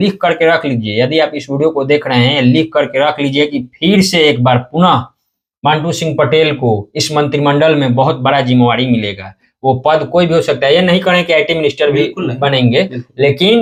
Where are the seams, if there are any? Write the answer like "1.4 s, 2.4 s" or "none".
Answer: none